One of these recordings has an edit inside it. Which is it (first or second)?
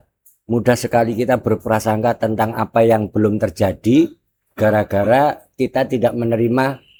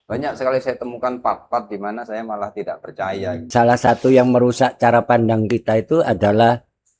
second